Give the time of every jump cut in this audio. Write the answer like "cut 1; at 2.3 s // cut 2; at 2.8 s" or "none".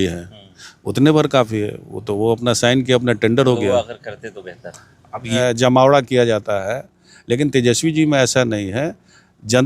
cut 1; at 5.3 s

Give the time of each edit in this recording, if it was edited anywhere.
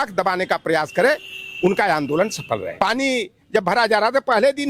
cut 1; at 2.7 s

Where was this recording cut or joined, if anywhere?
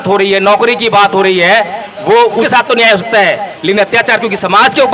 cut 1; at 2.5 s

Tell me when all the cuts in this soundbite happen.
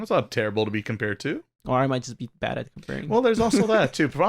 cut 1; at 1.5 s

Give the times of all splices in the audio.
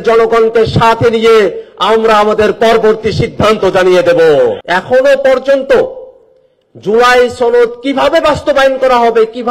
cut 1; at 4.6 s

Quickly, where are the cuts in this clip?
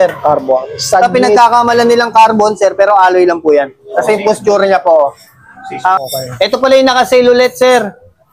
cut 1; at 6.0 s

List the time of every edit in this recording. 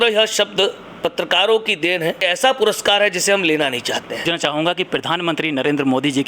cut 1; at 0.9 s // cut 2; at 2.2 s // cut 3; at 4.2 s

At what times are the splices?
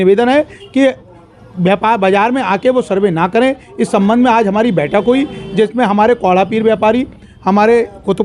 none

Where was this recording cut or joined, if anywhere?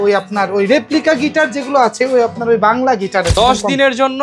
cut 1; at 3.3 s

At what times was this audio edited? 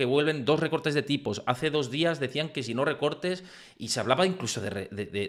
none

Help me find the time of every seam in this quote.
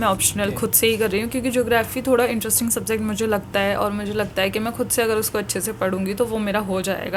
none

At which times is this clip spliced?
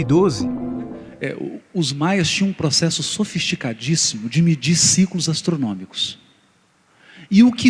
cut 1; at 2.6 s

